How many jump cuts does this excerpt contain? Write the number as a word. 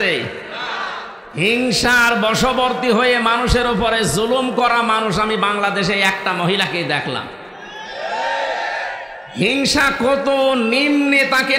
one